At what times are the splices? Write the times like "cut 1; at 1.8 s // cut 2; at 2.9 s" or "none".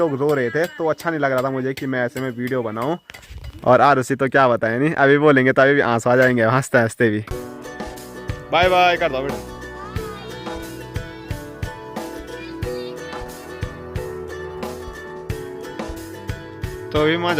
none